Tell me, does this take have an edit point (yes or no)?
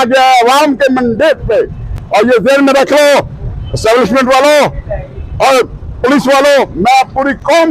no